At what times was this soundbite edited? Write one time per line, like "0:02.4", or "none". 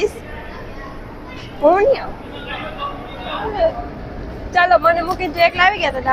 0:03.4